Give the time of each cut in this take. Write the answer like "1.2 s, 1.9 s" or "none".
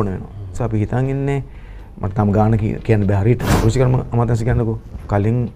3.5 s